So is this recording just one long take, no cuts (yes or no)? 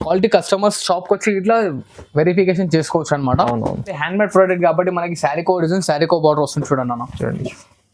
no